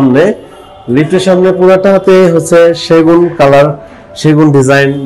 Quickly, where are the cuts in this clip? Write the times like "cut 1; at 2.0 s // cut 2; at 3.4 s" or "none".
none